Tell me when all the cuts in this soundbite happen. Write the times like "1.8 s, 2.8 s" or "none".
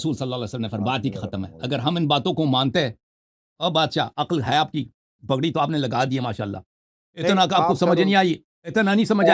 none